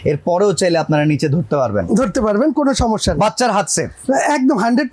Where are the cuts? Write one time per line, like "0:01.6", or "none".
none